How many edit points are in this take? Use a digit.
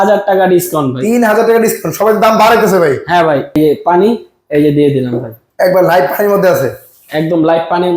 1